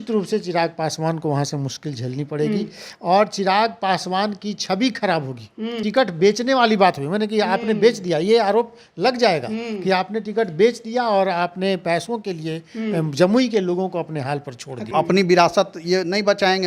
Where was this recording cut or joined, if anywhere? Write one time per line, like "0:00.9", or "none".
0:05.8
0:14.9

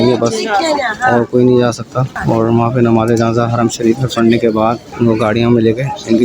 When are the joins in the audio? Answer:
0:02.1
0:04.9

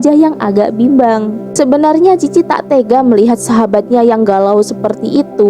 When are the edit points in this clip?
0:01.4

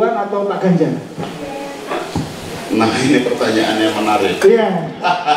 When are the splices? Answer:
none

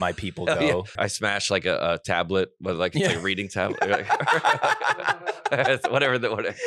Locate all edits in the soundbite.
0:00.9

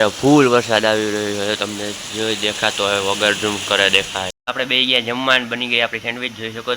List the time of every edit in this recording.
0:04.4

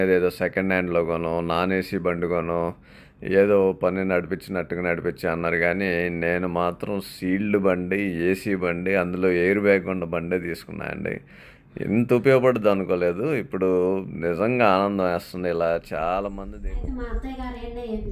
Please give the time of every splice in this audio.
0:16.5

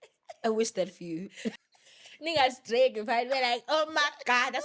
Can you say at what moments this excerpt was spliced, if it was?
0:01.6

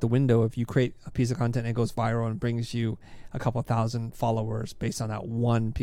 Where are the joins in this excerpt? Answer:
none

